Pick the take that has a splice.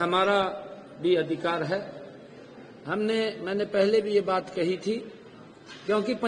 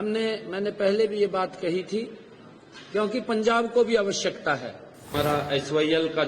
second; 1 cut; at 5.1 s

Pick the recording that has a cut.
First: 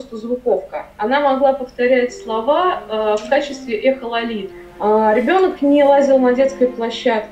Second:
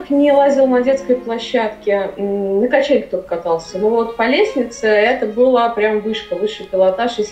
first; 1 cut; at 4.5 s

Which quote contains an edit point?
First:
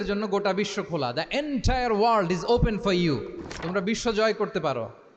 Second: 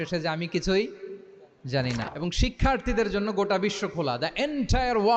second; 1 cut; at 2.0 s

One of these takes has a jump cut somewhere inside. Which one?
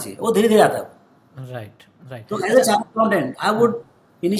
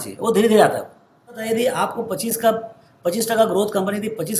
second; 1 cut; at 1.4 s

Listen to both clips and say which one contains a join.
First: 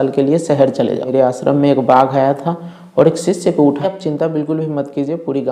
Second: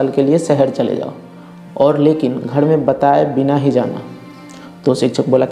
first; 2 cuts; at 1.1 s, 3.8 s

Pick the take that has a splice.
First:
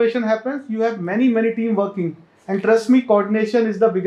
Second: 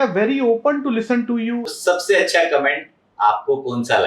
second; 1 cut; at 1.7 s

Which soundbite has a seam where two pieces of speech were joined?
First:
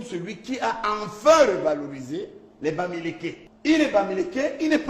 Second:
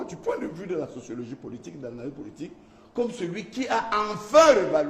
first; 1 cut; at 3.5 s

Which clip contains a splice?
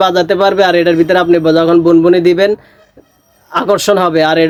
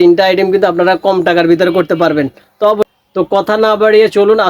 second; 1 cut; at 2.9 s

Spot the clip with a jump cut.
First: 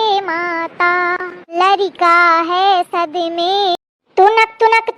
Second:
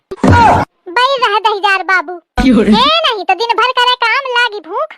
first; 1 cut; at 3.9 s

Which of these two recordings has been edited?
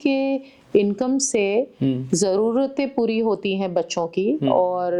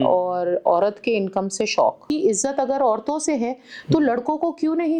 second; 1 cut; at 2.0 s

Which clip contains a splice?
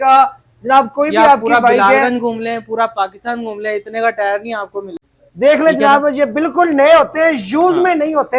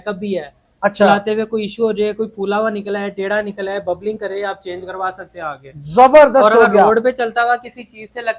first; 1 cut; at 4.8 s

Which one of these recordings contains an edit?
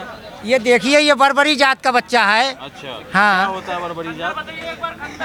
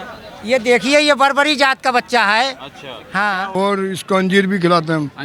second; 1 cut; at 3.6 s

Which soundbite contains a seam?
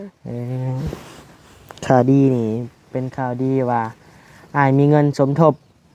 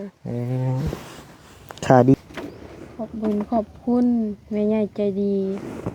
second; 1 cut; at 2.1 s

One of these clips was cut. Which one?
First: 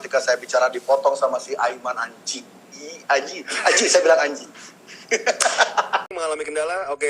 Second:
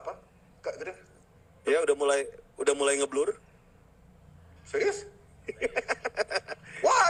first; 1 cut; at 6.0 s

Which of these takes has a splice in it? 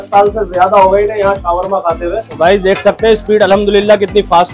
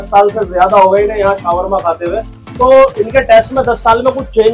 first; 1 cut; at 2.3 s

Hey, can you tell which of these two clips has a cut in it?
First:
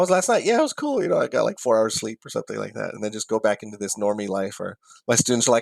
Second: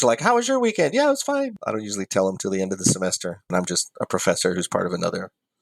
second; 2 cuts; at 1.6 s, 3.5 s

